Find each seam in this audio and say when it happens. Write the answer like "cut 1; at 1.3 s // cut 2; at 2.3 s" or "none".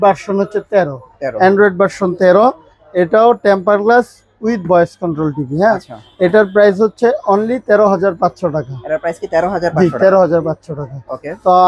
none

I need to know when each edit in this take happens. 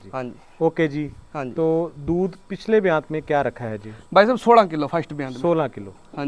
none

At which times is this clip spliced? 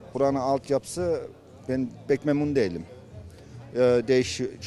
none

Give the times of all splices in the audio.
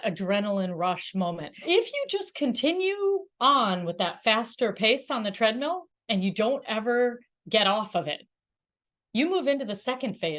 cut 1; at 1.6 s

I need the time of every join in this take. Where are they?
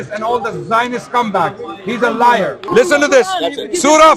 cut 1; at 2.7 s

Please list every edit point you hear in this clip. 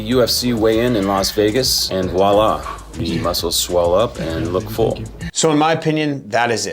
cut 1; at 1.8 s // cut 2; at 5.2 s

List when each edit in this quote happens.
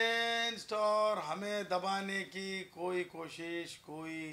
none

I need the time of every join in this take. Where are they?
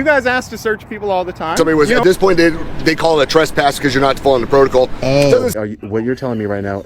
cut 1; at 1.5 s // cut 2; at 5.5 s

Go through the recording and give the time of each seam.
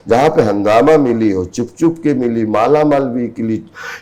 none

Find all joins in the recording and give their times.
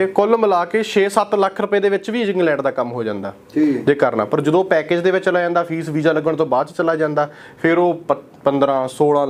none

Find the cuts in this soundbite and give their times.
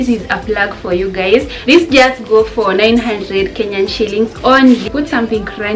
cut 1; at 1.5 s // cut 2; at 4.9 s

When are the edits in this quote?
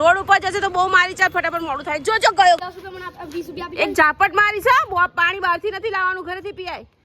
cut 1; at 2.6 s

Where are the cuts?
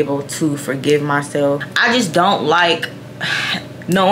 cut 1; at 1.7 s

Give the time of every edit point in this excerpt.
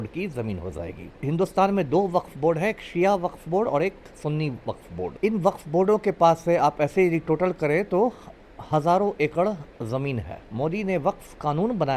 cut 1; at 1.2 s // cut 2; at 5.1 s // cut 3; at 10.4 s

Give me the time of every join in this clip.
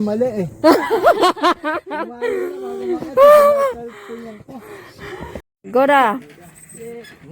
cut 1; at 5.4 s

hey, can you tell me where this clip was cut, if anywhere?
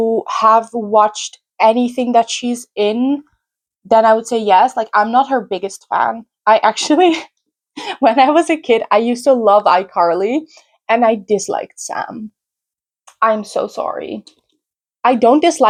none

